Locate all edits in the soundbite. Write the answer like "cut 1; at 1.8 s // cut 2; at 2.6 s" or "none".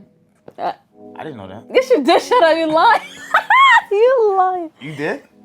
none